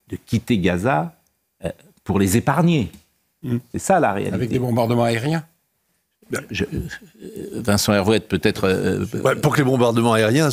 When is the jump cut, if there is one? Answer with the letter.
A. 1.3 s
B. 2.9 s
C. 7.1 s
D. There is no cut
D